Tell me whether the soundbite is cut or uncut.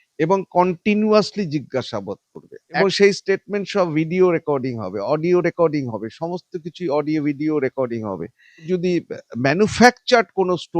cut